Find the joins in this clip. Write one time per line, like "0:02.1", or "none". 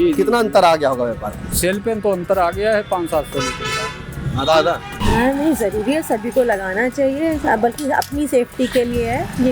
0:05.0

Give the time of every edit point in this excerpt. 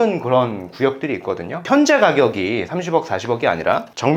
0:01.6

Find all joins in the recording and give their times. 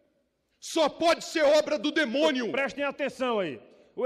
0:02.5

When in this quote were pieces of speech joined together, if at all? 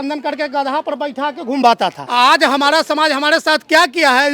0:02.0

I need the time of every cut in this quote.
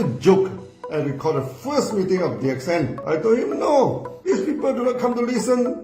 0:03.0
0:04.1

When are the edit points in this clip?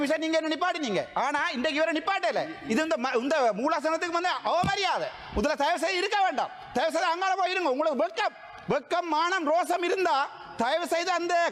none

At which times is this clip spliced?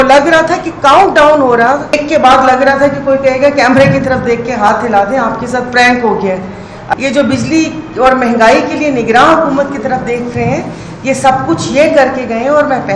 0:02.0
0:06.8

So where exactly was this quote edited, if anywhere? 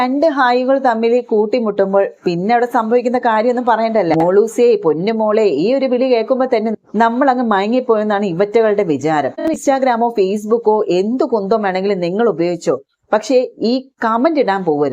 0:04.1
0:09.6

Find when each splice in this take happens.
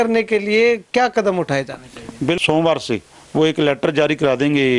0:02.4

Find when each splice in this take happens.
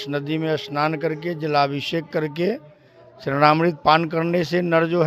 none

